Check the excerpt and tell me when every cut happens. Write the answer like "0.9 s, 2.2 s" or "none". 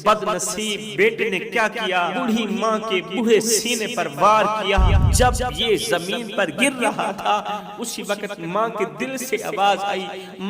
0.9 s, 2.2 s, 5.0 s